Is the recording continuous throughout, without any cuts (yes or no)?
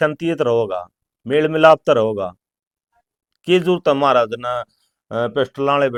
yes